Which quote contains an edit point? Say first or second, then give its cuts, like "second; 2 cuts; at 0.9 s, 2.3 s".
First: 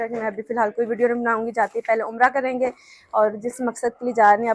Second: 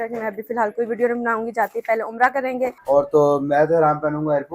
second; 1 cut; at 2.8 s